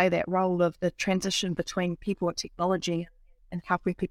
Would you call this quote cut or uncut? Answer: uncut